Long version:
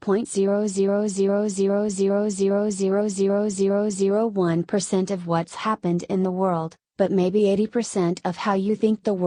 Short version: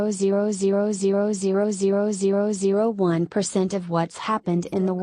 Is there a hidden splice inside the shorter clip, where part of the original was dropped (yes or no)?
yes